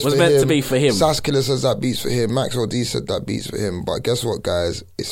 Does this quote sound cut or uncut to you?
uncut